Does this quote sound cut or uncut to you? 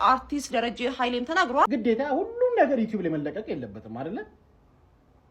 cut